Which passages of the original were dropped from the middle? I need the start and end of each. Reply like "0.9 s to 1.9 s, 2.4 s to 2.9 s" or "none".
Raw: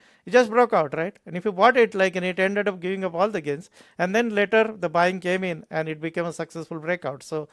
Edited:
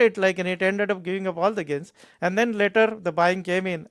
none